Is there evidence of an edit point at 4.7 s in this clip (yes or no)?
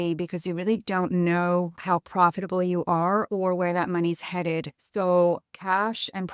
yes